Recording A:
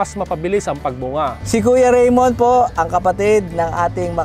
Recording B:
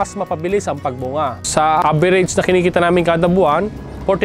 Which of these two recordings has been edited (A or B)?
B